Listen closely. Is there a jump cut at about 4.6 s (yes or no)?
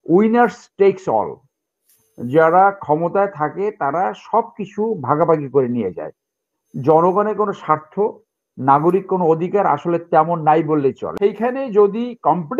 no